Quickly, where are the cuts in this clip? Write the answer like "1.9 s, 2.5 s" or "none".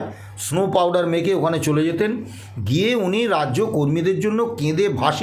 none